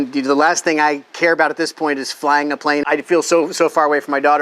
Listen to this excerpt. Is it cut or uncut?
cut